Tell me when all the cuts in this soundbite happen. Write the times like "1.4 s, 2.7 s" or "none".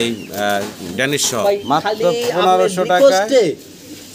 1.4 s